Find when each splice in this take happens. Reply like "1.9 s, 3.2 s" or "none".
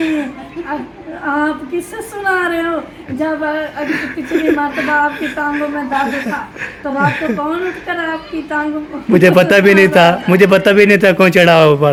none

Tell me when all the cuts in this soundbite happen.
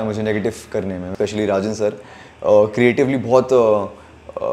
1.1 s

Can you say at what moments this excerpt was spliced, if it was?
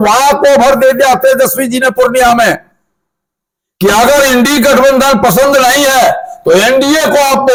none

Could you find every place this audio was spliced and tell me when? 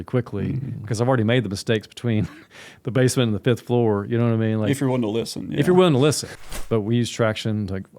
6.3 s

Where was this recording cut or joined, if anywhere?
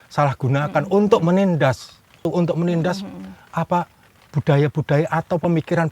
2.2 s

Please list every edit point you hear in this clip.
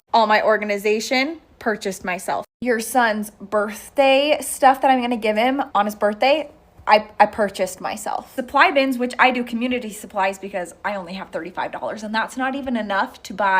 5.7 s, 8.3 s

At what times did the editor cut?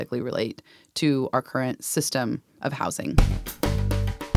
3.1 s

